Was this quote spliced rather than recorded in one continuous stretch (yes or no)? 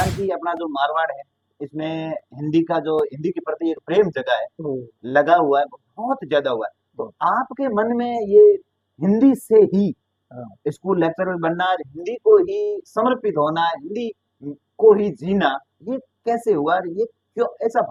no